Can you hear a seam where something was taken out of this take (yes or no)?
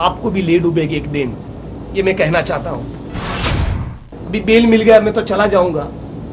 yes